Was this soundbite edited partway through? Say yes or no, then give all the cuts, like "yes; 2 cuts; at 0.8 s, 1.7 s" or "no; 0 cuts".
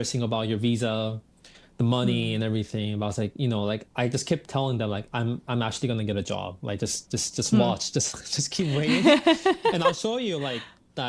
no; 0 cuts